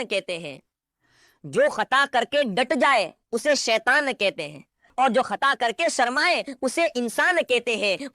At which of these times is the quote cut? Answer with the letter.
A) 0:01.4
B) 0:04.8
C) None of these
B